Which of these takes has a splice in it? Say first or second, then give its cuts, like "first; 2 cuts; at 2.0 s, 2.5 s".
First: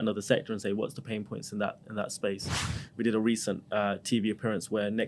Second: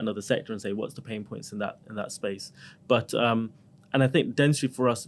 first; 1 cut; at 2.7 s